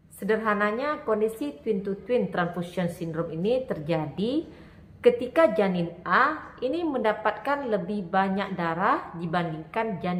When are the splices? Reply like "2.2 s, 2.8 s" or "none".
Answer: none